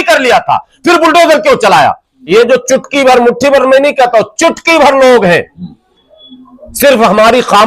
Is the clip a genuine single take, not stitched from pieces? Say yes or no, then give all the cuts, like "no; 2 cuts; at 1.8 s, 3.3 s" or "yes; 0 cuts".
no; 1 cut; at 2.1 s